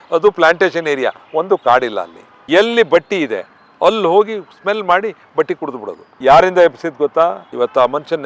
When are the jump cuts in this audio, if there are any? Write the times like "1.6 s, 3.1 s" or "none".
2.3 s, 6.1 s